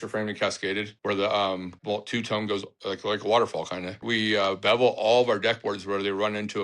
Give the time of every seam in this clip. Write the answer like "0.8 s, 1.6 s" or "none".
0.9 s, 1.7 s, 2.7 s, 4.0 s